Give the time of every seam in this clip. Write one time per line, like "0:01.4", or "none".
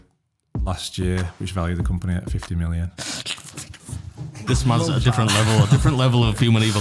0:02.9
0:04.4